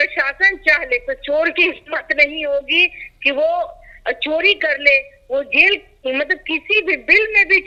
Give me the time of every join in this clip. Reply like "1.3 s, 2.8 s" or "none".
none